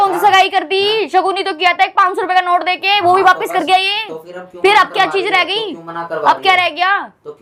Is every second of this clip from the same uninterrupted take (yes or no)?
yes